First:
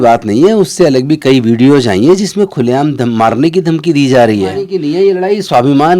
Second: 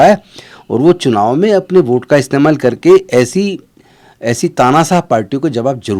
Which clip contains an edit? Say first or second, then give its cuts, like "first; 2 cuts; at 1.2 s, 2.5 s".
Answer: first; 1 cut; at 4.7 s